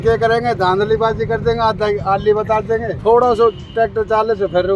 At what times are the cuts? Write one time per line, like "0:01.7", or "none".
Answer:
0:02.9

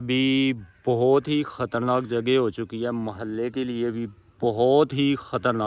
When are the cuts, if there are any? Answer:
none

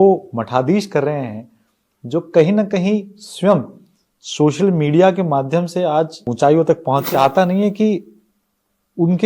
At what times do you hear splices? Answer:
0:06.3
0:07.1

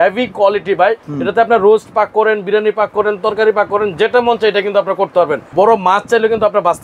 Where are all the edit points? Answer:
0:01.1
0:05.4

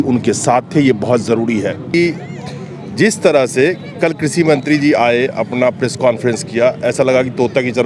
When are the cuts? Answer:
none

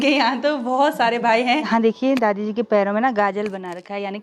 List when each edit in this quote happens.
0:01.7

